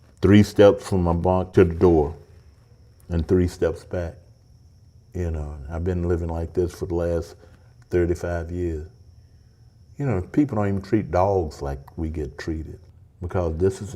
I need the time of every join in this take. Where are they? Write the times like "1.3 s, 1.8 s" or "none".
12.8 s